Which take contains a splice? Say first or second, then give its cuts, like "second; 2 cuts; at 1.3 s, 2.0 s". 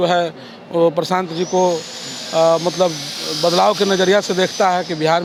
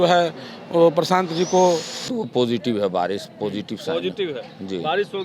second; 1 cut; at 2.2 s